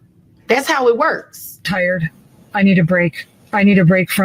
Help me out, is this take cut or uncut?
cut